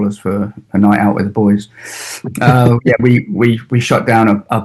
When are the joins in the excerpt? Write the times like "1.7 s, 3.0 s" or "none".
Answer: none